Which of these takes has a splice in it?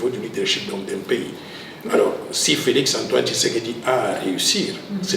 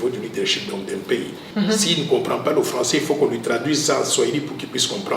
second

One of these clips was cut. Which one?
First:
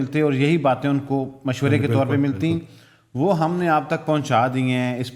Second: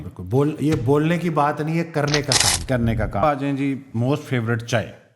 second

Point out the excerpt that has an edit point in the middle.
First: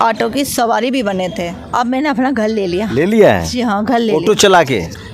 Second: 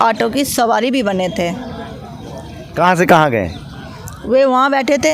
first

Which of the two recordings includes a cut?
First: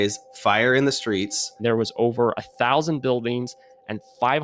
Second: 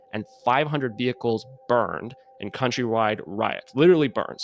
first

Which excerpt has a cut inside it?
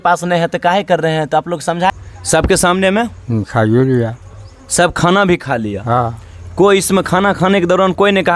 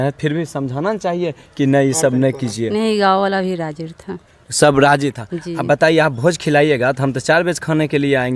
first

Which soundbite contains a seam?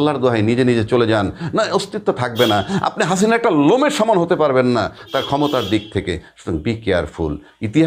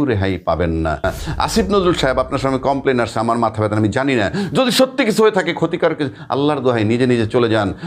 second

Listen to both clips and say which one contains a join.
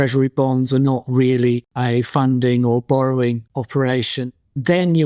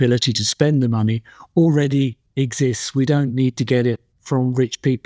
first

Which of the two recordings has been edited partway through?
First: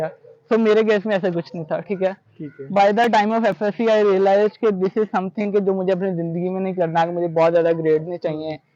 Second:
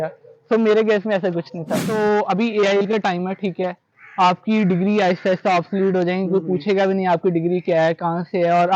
second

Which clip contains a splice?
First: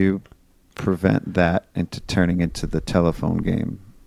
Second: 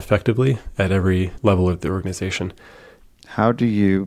second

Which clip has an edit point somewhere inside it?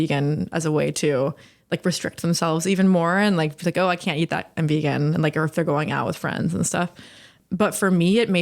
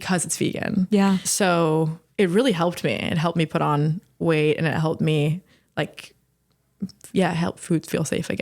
second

